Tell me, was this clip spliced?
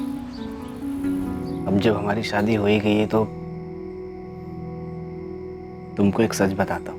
yes; 1 cut; at 1.5 s

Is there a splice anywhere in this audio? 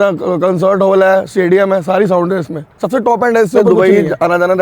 yes; 1 cut; at 3.7 s

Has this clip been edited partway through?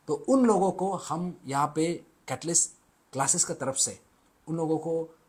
no; 0 cuts

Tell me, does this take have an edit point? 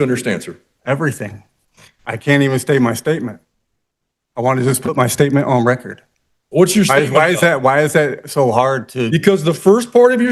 no; 0 cuts

